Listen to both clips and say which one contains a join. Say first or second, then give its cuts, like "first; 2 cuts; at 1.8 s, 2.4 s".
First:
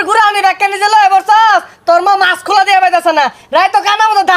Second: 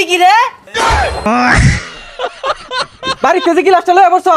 second; 2 cuts; at 1.0 s, 3.0 s